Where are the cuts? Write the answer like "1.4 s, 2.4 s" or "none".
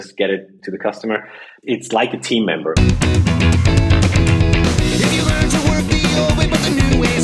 1.5 s, 2.7 s